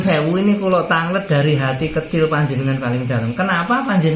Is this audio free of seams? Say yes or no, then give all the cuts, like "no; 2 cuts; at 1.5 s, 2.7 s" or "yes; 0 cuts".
yes; 0 cuts